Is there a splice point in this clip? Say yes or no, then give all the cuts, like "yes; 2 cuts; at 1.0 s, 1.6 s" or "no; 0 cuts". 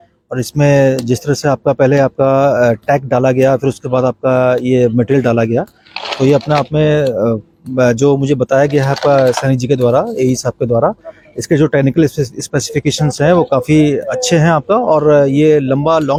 no; 0 cuts